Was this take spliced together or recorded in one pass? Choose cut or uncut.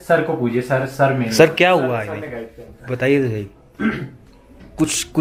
uncut